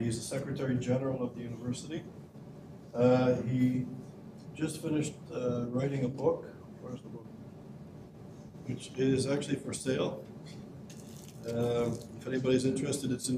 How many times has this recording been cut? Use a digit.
0